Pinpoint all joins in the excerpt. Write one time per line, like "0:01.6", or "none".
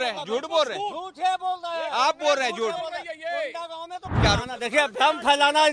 0:04.1